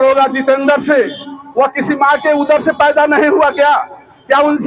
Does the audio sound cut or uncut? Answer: cut